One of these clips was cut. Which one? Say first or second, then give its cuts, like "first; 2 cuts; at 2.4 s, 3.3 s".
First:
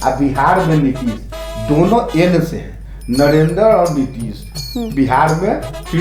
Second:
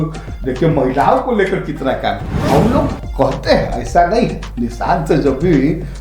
second; 1 cut; at 2.3 s